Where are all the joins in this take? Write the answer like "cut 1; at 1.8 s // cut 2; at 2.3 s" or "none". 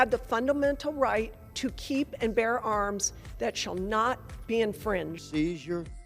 none